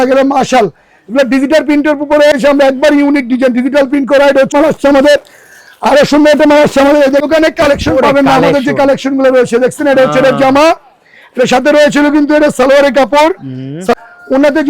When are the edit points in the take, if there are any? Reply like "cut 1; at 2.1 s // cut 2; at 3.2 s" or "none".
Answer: cut 1; at 2.3 s // cut 2; at 4.5 s // cut 3; at 7.2 s // cut 4; at 13.9 s